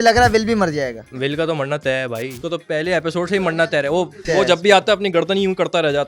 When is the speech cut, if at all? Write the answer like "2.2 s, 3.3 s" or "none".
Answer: 1.1 s, 2.4 s

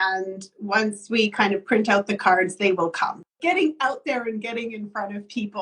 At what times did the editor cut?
3.4 s

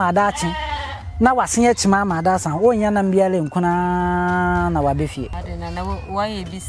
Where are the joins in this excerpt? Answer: 5.4 s

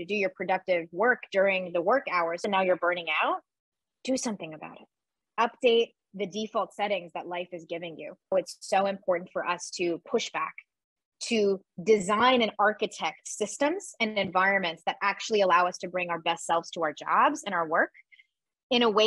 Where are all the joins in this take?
2.4 s, 5.2 s, 8.3 s

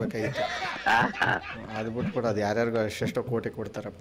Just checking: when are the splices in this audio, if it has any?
none

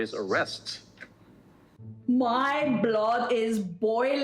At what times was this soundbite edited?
2.1 s

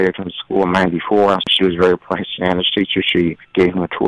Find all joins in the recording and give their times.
1.5 s

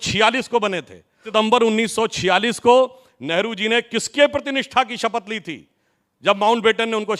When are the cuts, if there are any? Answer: 1.3 s

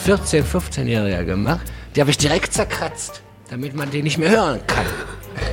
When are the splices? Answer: 1.6 s, 3.4 s

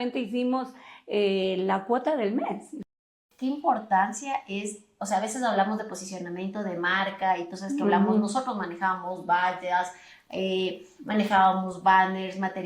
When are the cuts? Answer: 2.9 s

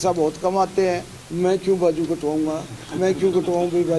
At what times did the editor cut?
1.2 s

